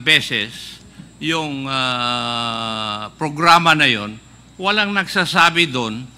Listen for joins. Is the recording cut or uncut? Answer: uncut